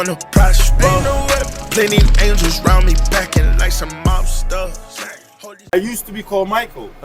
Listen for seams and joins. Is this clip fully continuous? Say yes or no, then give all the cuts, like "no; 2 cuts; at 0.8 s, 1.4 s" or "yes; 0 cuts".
no; 1 cut; at 5.7 s